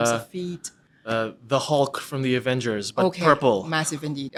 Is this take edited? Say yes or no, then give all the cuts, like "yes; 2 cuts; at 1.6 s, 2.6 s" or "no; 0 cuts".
no; 0 cuts